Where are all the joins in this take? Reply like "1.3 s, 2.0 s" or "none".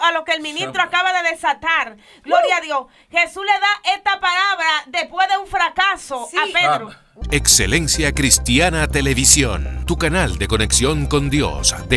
7.0 s

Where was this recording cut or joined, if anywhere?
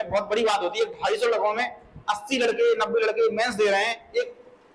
none

